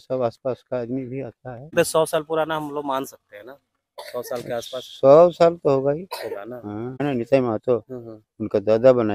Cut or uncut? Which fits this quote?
cut